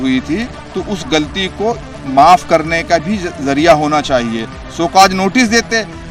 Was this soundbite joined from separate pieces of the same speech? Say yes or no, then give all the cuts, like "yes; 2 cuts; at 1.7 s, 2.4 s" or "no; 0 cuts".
no; 0 cuts